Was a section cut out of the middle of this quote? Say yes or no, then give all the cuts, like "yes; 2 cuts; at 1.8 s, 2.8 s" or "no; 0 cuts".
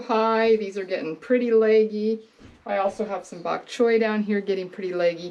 no; 0 cuts